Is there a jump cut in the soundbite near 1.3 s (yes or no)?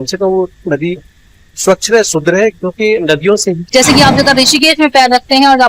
no